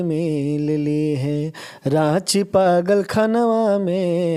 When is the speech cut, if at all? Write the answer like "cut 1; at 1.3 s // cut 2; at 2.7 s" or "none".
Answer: none